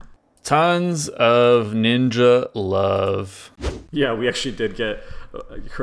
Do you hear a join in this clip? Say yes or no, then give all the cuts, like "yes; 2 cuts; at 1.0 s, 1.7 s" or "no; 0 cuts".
yes; 1 cut; at 3.7 s